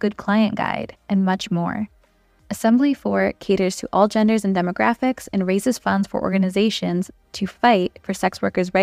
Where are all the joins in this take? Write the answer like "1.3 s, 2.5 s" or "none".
none

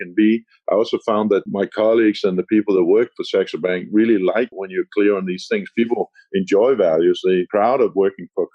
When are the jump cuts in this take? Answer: none

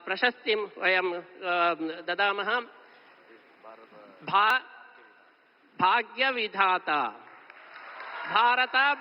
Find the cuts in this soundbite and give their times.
4.5 s

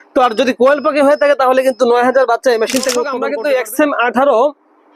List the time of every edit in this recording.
3.2 s

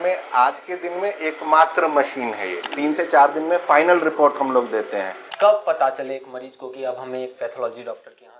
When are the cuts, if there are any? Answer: 2.6 s, 5.2 s

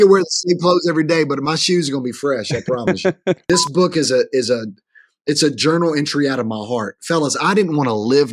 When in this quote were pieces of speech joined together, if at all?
3.4 s

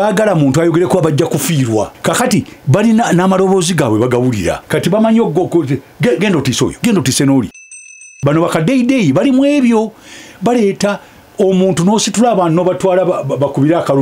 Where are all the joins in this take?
1.9 s, 4.6 s, 6.8 s, 8.0 s

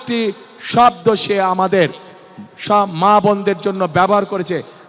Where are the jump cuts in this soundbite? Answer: none

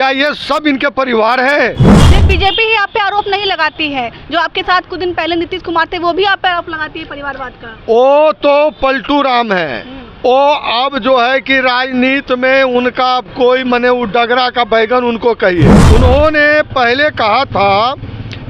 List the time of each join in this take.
2.1 s, 15.8 s

